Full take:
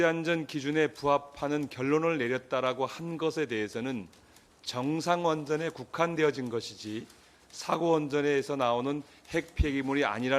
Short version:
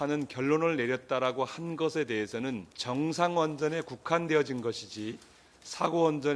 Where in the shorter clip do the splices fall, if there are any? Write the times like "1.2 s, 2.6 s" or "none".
2.7 s